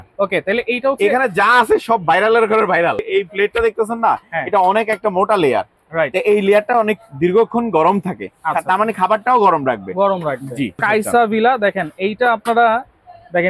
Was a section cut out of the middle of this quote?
yes; 2 cuts; at 3.1 s, 10.8 s

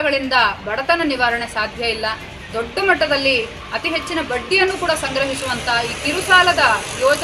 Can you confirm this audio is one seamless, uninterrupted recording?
yes; 0 cuts

